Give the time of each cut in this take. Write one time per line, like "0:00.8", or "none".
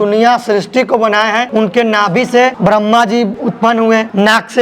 0:01.5
0:02.6
0:03.5